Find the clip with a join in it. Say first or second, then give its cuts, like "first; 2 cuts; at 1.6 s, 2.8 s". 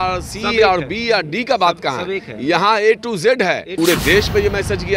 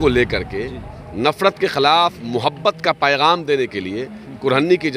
first; 1 cut; at 3.7 s